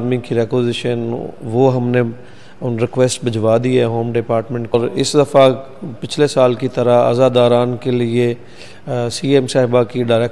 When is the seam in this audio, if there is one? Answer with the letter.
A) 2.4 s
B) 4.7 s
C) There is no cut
B